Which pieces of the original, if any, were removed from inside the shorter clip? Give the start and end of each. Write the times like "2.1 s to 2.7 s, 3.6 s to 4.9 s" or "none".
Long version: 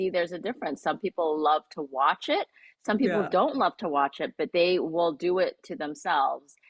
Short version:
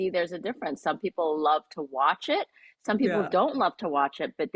none

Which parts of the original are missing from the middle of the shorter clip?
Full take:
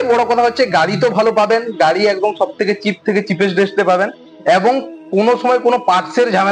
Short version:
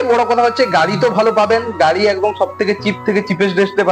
none

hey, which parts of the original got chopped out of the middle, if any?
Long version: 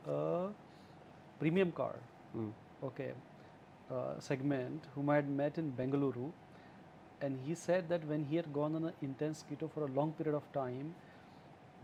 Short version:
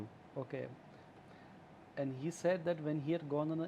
3.7 s to 6.5 s

